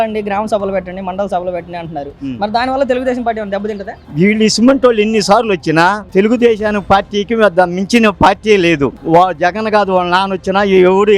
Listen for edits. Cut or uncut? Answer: cut